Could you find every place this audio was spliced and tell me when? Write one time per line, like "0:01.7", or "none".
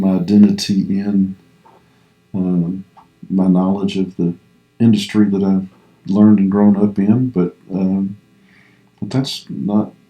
none